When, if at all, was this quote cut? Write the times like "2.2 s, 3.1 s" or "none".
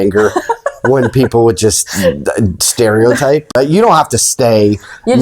3.5 s